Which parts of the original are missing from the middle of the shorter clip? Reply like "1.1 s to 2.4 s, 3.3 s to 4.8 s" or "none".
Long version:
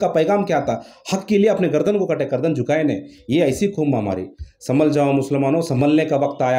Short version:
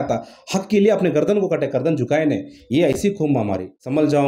3.7 s to 4.0 s